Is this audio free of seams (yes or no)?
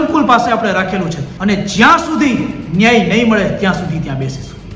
no